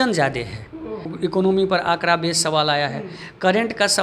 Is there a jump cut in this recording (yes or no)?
yes